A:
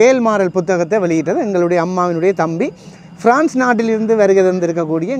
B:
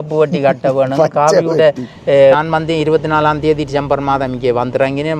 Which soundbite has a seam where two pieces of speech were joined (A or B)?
B